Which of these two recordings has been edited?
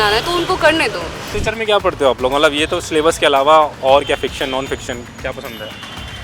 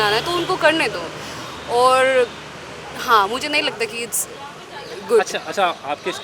first; 1 cut; at 1.2 s

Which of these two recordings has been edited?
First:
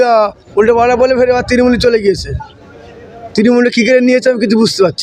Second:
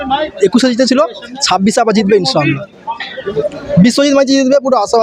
second; 1 cut; at 3.2 s

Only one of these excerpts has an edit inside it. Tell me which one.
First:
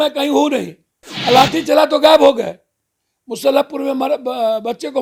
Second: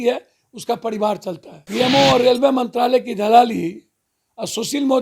second; 1 cut; at 1.5 s

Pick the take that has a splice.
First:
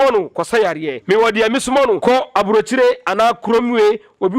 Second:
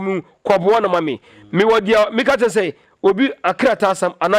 first; 2 cuts; at 0.9 s, 2.0 s

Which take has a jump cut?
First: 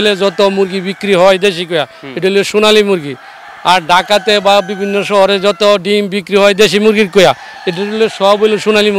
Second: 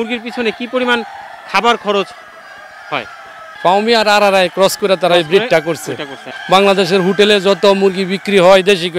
second; 2 cuts; at 3.5 s, 6.3 s

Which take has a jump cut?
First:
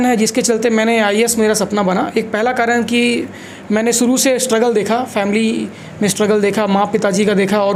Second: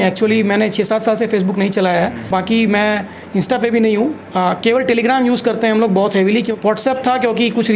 second; 2 cuts; at 2.3 s, 6.5 s

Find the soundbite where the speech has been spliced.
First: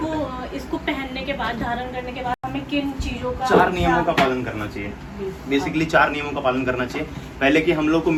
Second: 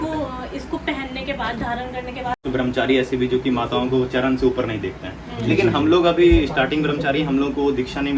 second; 1 cut; at 2.4 s

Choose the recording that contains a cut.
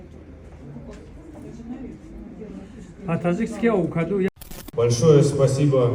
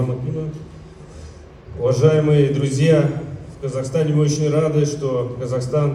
first; 1 cut; at 4.4 s

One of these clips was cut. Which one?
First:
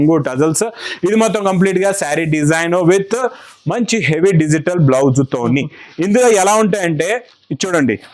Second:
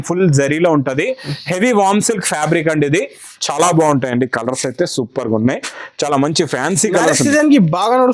second; 1 cut; at 3.7 s

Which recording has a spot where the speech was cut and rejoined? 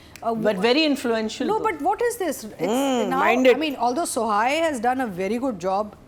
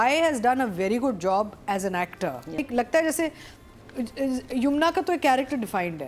second; 1 cut; at 2.6 s

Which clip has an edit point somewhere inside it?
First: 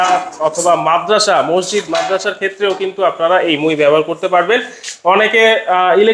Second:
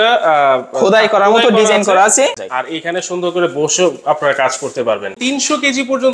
second; 2 cuts; at 2.4 s, 5.1 s

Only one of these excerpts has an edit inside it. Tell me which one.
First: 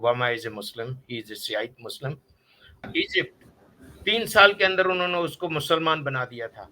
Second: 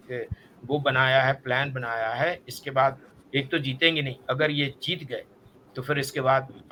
first; 1 cut; at 2.8 s

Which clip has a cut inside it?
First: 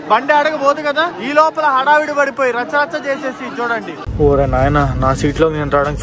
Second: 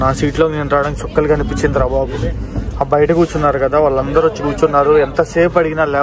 first; 1 cut; at 4.1 s

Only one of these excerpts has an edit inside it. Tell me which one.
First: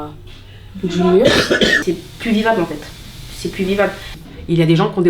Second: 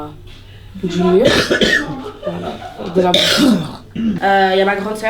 first; 1 cut; at 1.8 s

